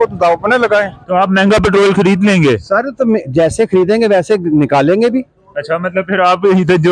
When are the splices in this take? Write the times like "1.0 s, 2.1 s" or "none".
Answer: 1.0 s